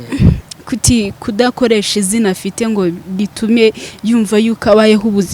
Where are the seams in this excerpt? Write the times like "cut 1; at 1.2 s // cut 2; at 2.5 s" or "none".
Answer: none